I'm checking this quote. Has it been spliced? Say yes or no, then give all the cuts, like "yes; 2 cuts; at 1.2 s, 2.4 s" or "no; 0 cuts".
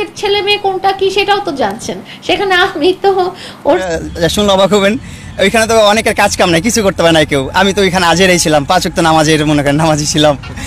yes; 1 cut; at 3.9 s